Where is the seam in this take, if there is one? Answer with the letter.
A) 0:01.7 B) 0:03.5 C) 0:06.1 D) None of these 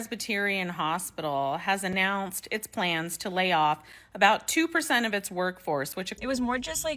C